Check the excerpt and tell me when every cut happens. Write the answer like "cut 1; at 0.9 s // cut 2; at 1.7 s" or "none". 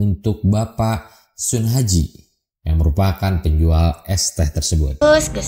none

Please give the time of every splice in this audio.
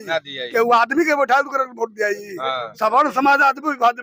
none

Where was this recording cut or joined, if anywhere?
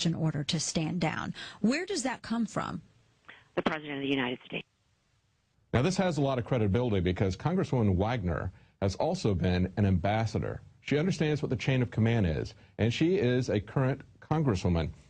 cut 1; at 2.2 s

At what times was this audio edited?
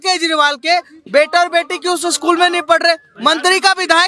none

